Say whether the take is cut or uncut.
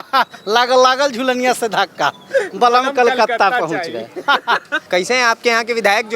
cut